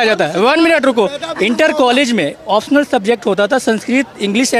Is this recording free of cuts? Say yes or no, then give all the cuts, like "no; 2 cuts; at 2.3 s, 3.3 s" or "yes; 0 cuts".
yes; 0 cuts